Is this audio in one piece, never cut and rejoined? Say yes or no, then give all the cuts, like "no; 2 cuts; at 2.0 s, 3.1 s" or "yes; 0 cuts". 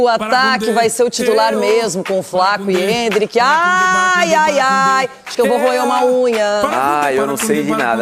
yes; 0 cuts